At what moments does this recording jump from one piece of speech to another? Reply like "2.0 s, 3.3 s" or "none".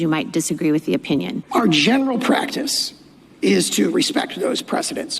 1.4 s